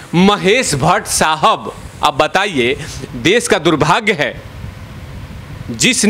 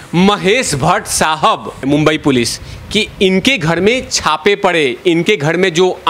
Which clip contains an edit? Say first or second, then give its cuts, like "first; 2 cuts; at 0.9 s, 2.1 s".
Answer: second; 1 cut; at 1.8 s